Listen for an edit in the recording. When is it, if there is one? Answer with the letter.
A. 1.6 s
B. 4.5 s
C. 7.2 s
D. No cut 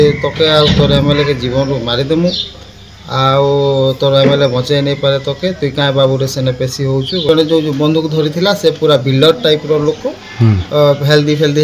C